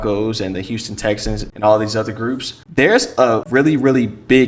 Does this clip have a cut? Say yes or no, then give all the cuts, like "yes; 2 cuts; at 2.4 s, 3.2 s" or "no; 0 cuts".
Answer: yes; 3 cuts; at 1.5 s, 2.5 s, 3.4 s